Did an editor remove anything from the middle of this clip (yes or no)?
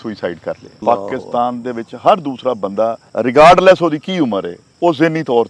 yes